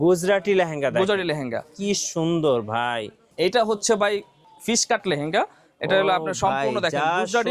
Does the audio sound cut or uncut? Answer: cut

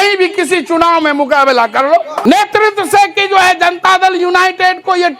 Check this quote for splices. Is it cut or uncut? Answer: cut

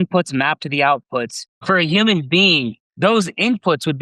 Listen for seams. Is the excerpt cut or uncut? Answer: cut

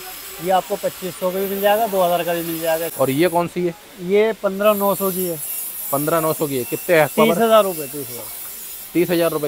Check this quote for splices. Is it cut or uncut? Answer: cut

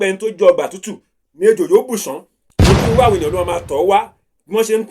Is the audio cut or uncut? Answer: cut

